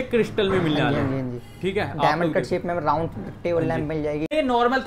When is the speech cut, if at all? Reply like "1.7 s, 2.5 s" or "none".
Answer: none